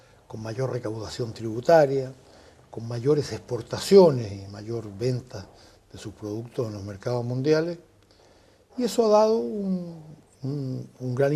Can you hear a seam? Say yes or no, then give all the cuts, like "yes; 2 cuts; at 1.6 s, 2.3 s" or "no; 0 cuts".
yes; 1 cut; at 7.7 s